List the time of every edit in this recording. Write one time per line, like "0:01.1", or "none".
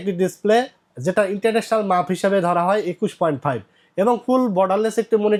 none